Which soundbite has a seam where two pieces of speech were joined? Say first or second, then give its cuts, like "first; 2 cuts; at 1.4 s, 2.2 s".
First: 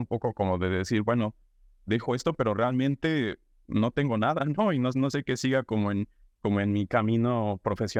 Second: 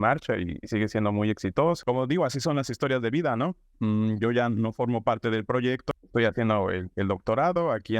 second; 2 cuts; at 1.8 s, 5.9 s